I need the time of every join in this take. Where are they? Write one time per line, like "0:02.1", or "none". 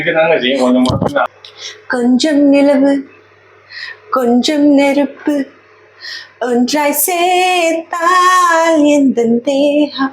0:01.2